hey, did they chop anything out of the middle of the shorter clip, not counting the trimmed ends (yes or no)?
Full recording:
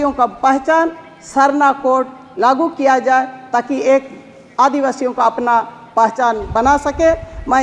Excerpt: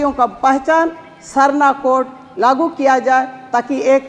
no